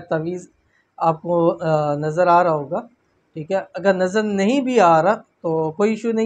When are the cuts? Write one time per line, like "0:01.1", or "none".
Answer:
none